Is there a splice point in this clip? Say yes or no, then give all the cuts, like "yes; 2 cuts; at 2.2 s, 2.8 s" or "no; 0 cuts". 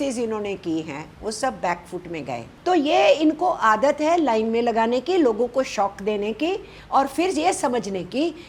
yes; 1 cut; at 2.5 s